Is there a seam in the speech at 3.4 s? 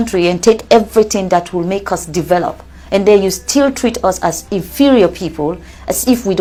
no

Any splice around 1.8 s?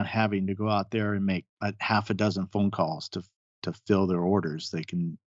no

